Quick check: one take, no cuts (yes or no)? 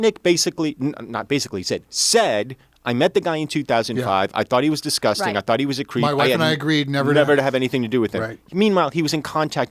yes